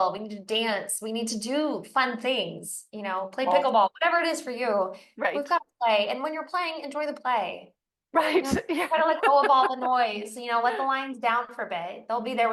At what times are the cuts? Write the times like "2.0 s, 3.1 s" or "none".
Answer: none